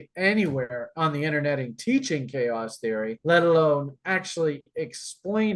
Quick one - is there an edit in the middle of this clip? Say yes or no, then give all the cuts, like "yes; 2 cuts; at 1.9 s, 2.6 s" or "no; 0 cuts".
no; 0 cuts